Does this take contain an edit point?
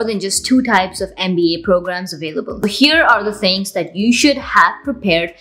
yes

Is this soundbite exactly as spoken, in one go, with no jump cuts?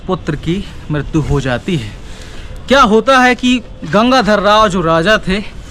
yes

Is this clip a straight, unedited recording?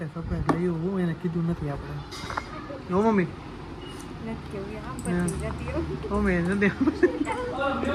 yes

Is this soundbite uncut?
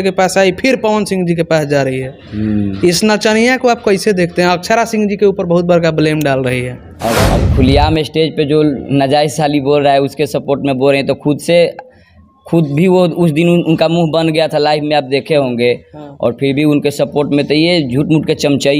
no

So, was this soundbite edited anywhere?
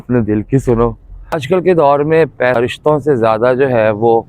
yes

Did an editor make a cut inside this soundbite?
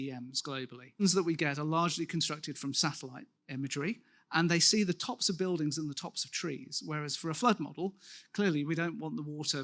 no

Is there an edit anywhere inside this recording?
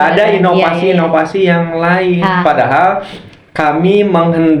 no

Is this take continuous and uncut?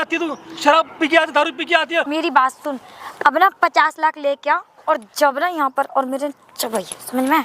no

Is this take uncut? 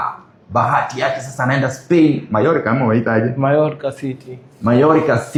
yes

